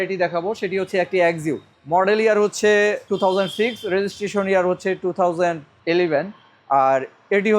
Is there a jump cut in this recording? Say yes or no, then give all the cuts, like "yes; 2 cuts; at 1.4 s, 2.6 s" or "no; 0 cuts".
yes; 2 cuts; at 1.7 s, 3.0 s